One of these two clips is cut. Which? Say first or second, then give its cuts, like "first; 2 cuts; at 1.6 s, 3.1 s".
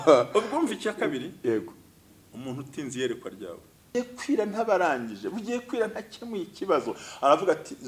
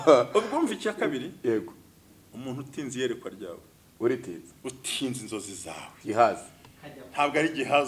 first; 1 cut; at 3.9 s